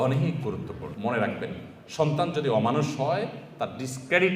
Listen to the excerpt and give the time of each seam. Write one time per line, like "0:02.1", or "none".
0:00.9